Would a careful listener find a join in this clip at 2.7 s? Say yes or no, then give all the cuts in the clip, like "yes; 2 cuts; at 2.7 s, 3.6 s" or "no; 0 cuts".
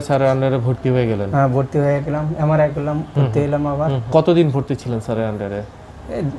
no; 1 cut; at 4.1 s